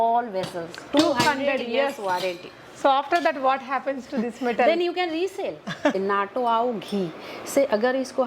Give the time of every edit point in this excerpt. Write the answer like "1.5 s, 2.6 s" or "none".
6.0 s